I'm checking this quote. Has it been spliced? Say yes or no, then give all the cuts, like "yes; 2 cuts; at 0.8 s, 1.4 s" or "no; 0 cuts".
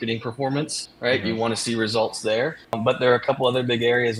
no; 0 cuts